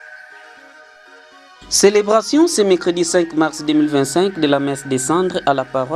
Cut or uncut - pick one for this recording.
cut